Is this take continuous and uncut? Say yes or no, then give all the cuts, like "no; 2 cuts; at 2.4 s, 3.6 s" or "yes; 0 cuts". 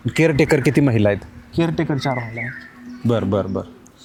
yes; 0 cuts